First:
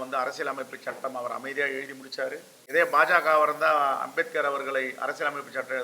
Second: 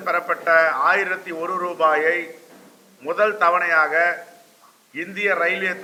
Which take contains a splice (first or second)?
first